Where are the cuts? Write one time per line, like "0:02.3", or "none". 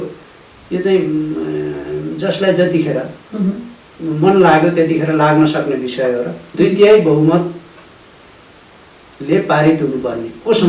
none